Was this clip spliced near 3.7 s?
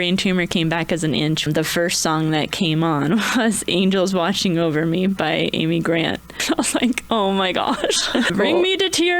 no; 3 cuts; at 1.5 s, 6.4 s, 8.3 s

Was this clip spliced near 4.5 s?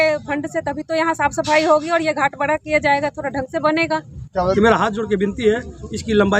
yes; 1 cut; at 4.5 s

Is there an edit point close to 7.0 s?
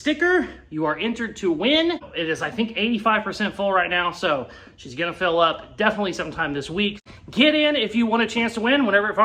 yes; 1 cut; at 7.0 s

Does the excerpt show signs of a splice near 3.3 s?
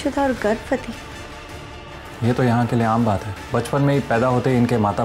yes; 1 cut; at 3.3 s

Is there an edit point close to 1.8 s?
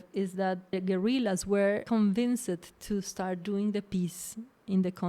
yes; 2 cuts; at 0.7 s, 1.8 s

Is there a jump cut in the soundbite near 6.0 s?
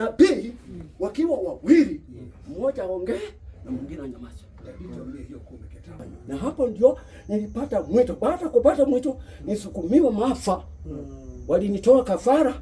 yes; 1 cut; at 6.0 s

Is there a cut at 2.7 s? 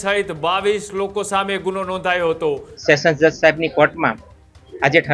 yes; 1 cut; at 2.7 s

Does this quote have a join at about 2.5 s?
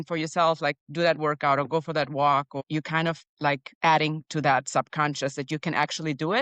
yes; 1 cut; at 2.5 s

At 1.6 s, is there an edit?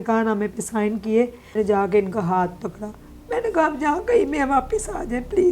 yes; 1 cut; at 1.6 s

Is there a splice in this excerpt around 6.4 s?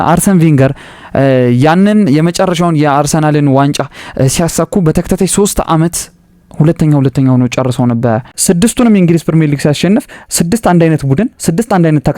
no; 1 cut; at 8.3 s

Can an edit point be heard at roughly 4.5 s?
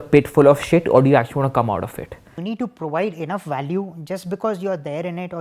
no; 1 cut; at 2.4 s

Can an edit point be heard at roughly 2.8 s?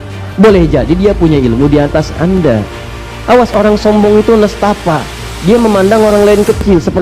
yes; 1 cut; at 2.8 s

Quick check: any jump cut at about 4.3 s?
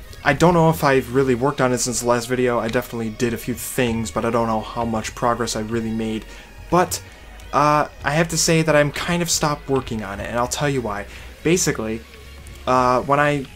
yes; 1 cut; at 4.3 s

